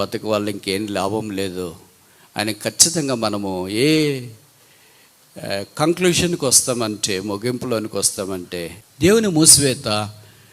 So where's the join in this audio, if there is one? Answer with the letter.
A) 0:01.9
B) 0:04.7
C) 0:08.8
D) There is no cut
C